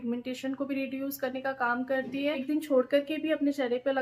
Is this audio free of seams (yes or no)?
no